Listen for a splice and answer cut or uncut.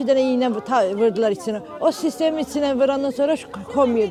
uncut